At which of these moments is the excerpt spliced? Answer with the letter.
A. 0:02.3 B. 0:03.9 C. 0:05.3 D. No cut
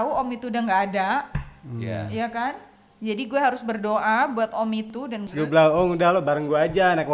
C